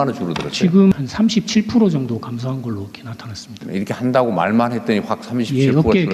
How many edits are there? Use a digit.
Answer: 1